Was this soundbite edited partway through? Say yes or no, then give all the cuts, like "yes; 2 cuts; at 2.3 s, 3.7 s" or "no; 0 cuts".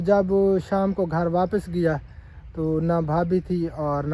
no; 0 cuts